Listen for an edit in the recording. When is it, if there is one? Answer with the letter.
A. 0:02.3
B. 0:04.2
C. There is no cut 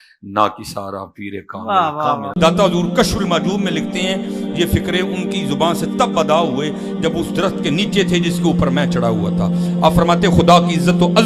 A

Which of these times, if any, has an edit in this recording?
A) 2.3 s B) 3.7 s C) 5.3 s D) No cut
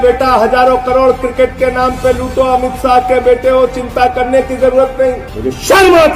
C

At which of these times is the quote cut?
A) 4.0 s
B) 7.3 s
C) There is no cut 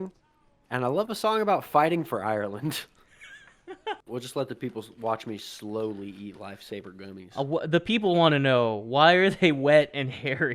A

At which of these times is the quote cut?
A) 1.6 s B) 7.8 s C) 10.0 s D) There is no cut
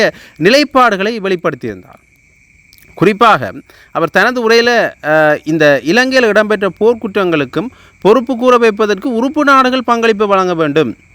D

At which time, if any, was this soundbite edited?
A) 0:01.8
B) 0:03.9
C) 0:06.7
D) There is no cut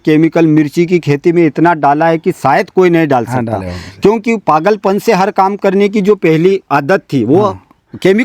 D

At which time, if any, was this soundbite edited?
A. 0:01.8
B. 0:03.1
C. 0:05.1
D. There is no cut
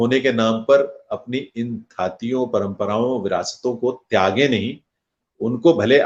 D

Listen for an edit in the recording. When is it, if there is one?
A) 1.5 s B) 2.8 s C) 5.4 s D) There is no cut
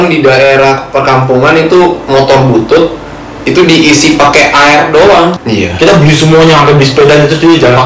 C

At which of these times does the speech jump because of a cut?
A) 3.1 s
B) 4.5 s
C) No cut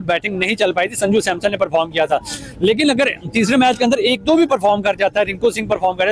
C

